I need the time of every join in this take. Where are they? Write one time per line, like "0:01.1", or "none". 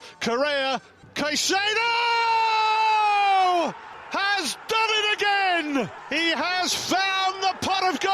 0:01.0
0:03.9
0:06.0